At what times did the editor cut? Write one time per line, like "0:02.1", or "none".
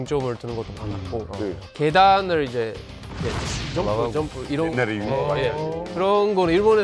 none